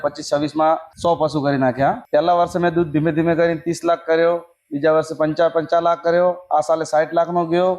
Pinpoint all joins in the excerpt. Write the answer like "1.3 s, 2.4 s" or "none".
0.9 s, 2.0 s